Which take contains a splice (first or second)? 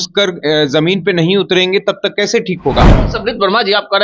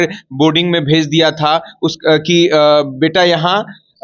first